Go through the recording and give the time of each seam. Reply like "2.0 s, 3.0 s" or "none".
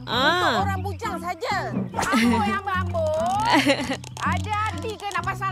none